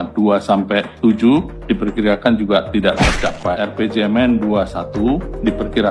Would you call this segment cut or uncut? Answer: cut